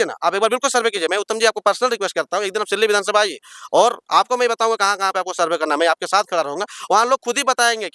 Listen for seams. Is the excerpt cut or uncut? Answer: uncut